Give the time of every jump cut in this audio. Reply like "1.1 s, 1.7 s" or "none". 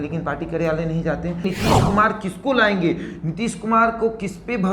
1.4 s